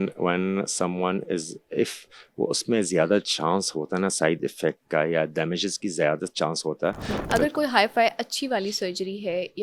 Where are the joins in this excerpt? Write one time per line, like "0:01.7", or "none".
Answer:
0:07.1